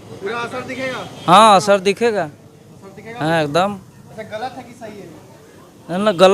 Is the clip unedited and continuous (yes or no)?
yes